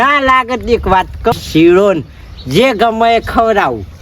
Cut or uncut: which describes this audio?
cut